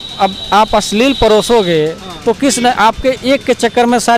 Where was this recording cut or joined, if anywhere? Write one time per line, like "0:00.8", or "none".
none